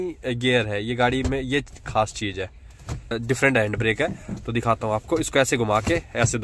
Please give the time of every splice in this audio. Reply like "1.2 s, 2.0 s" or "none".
3.2 s